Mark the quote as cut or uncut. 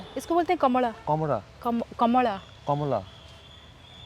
cut